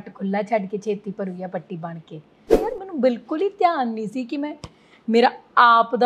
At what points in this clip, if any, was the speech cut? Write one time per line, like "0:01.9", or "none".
0:02.4